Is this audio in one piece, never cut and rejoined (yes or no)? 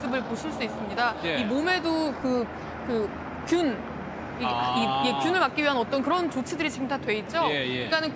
no